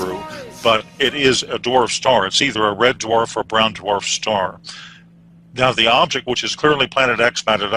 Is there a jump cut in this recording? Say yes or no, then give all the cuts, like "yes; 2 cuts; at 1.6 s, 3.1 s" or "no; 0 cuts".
yes; 1 cut; at 5.4 s